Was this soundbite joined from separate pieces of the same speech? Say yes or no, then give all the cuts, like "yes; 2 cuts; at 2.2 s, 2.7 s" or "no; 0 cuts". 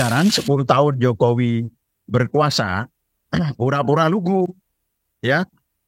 no; 0 cuts